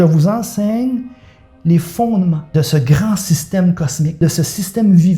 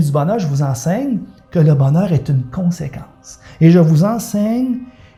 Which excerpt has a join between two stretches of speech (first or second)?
first